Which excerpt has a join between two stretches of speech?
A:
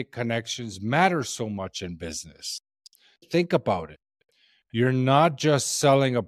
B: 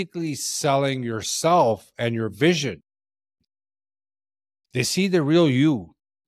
A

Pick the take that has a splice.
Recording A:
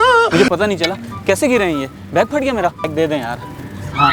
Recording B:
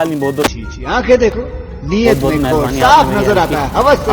A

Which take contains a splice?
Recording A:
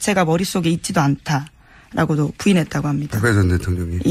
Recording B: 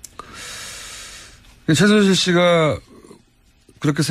B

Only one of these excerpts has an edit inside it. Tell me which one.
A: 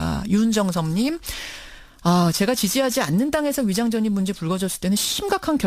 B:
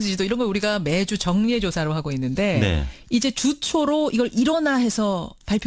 A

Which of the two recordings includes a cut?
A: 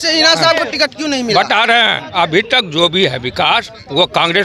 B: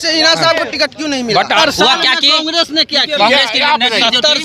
B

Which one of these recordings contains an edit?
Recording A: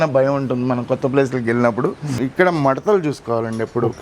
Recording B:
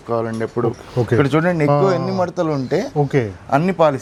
A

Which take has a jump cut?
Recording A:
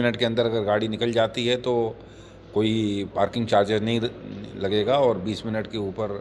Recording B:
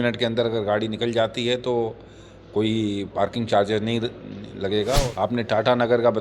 B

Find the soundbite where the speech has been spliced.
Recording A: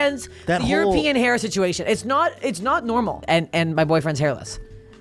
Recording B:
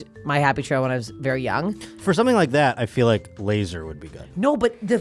A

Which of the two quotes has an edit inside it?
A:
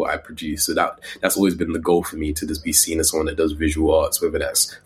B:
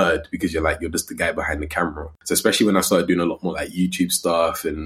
B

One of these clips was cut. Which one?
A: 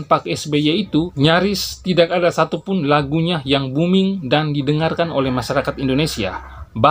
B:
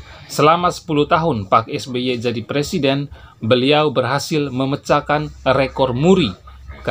A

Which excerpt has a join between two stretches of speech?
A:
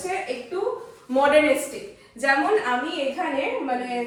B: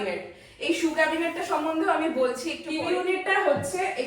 B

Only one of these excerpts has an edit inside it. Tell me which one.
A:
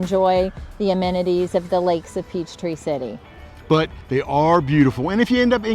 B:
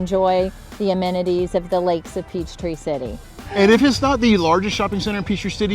B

